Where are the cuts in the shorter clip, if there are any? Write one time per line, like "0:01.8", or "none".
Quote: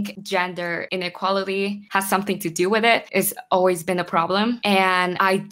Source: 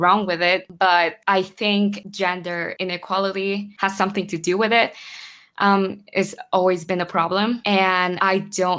0:03.1